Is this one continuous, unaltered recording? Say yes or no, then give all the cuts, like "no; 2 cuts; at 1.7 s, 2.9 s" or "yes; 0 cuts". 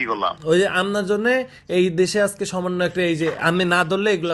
yes; 0 cuts